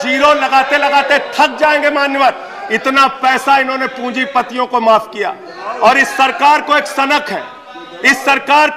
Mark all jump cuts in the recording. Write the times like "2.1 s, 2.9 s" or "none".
none